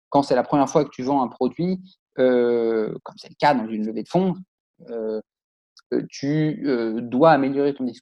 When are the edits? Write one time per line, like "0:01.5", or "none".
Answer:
none